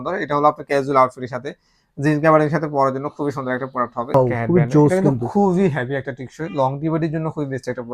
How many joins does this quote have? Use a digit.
1